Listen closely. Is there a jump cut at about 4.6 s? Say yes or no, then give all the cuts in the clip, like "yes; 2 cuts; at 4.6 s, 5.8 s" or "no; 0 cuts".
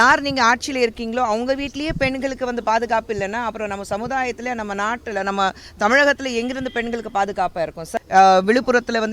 no; 1 cut; at 7.9 s